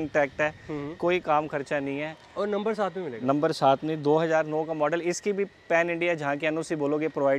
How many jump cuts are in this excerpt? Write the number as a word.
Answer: zero